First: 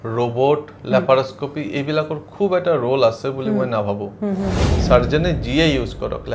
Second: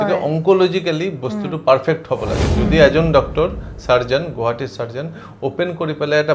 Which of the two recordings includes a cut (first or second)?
first